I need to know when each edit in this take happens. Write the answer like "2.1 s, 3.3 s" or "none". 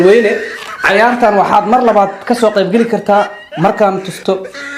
none